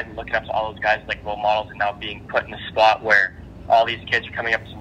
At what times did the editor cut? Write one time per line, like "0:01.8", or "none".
none

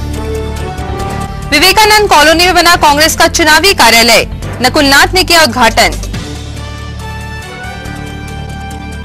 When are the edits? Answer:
0:00.9

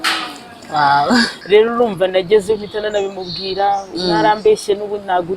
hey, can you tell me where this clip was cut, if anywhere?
0:01.4

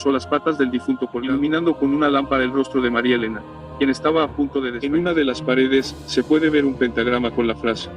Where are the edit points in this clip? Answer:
0:01.1
0:04.7

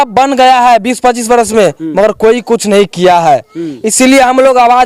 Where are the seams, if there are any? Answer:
none

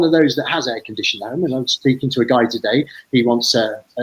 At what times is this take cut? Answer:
none

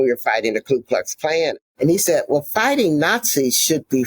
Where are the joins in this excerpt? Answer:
0:01.5

